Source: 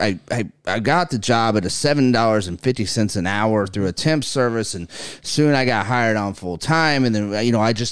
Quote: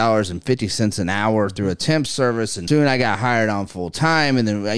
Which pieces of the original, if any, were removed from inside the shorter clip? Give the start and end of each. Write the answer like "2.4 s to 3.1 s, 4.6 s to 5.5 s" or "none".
4.7 s to 5.2 s